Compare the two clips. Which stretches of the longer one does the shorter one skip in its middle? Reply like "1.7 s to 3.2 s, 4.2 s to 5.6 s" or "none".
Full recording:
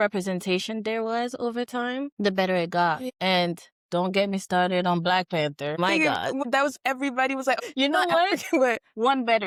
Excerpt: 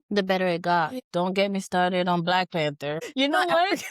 3.1 s to 3.8 s, 5.8 s to 7.6 s